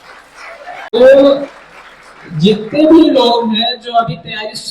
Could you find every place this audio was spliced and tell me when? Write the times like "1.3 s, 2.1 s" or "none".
0.9 s